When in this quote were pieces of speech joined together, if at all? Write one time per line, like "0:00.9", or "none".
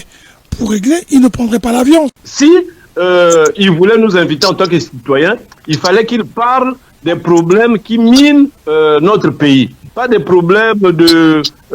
0:02.2